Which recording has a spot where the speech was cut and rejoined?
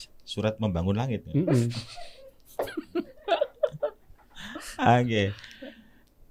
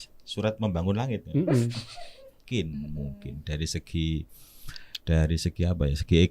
second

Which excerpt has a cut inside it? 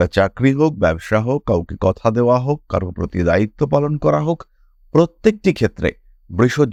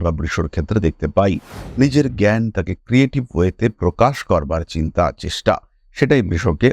second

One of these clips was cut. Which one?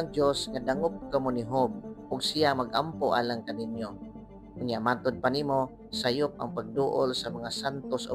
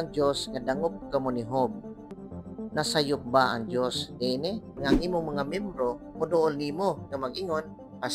second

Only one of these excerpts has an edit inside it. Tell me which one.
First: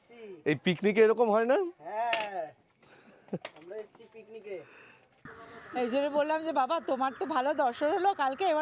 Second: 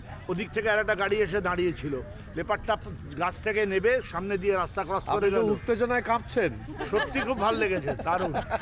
first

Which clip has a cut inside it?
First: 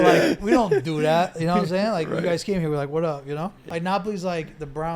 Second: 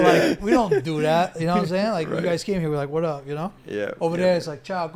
first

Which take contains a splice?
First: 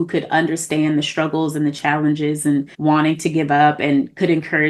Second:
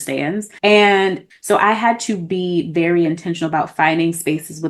second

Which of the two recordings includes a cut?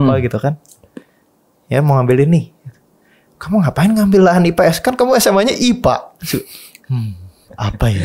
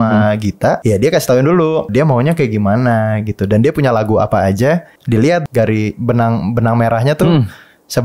second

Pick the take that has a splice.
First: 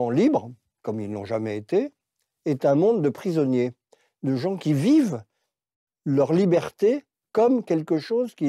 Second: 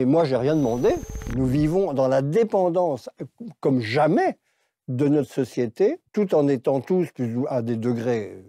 second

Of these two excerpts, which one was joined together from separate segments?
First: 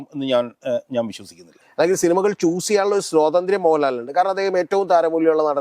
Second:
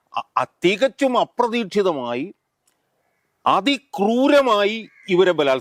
first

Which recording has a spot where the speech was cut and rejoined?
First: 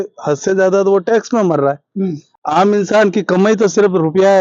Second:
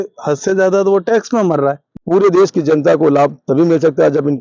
second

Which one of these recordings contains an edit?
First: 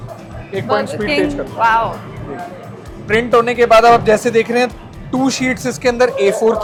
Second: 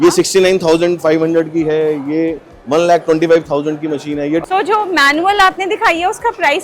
second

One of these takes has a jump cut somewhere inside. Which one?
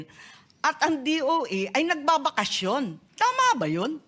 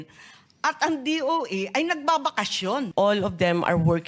second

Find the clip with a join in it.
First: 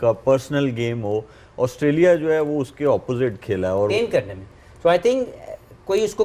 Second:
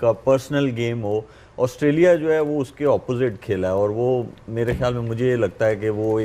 first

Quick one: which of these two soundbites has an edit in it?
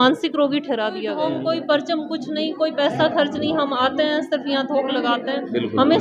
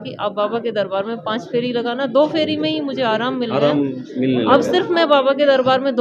first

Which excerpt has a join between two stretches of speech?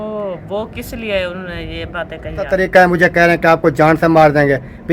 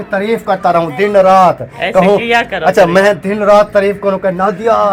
first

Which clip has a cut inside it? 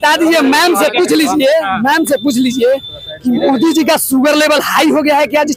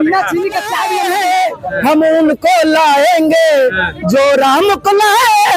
second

